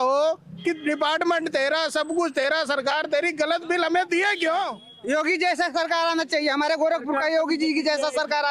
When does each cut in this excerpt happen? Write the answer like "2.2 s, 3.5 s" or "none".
4.9 s